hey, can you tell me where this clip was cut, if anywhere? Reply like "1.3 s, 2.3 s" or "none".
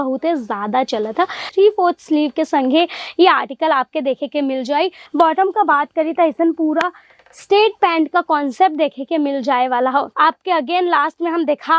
1.5 s, 5.0 s, 10.1 s